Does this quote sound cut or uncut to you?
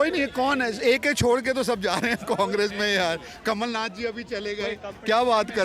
uncut